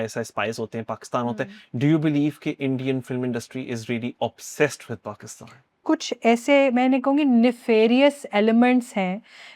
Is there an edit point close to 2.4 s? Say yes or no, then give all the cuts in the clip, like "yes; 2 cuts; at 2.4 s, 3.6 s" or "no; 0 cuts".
no; 1 cut; at 5.8 s